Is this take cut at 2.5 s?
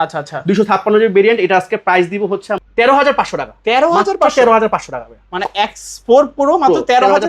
yes; 1 cut; at 2.5 s

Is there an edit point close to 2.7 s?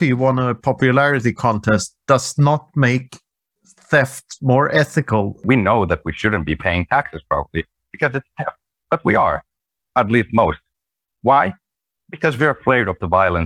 no; 2 cuts; at 5.4 s, 8.7 s

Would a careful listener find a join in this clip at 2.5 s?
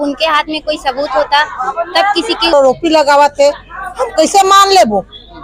yes; 1 cut; at 2.5 s

